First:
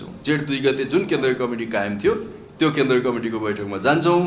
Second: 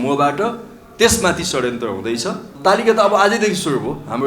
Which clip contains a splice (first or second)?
second